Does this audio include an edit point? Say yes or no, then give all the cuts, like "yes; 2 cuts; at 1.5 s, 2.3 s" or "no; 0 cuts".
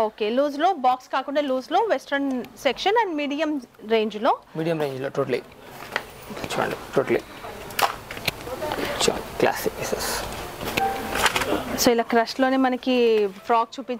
no; 0 cuts